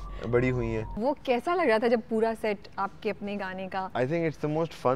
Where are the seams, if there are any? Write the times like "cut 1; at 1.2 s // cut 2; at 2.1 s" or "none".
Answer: cut 1; at 1.0 s // cut 2; at 3.8 s